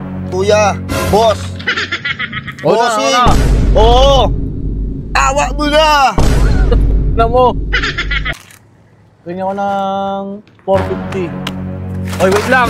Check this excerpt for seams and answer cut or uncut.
cut